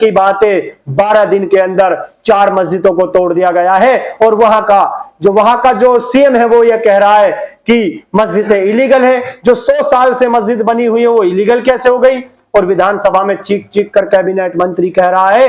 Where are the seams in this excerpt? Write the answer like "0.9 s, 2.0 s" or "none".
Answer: none